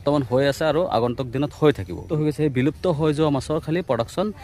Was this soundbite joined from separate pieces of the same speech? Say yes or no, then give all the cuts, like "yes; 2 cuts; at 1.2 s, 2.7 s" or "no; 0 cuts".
yes; 1 cut; at 2.1 s